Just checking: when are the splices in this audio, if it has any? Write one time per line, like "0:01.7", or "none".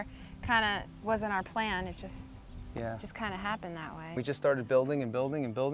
0:04.2